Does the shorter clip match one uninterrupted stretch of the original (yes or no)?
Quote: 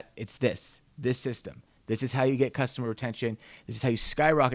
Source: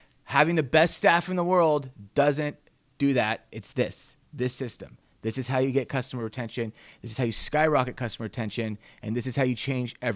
yes